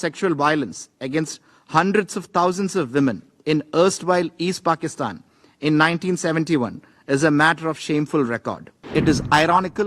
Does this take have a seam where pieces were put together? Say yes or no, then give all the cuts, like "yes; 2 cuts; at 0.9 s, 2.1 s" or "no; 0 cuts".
yes; 1 cut; at 8.7 s